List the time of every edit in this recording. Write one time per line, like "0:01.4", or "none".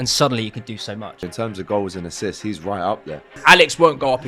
0:01.3
0:03.4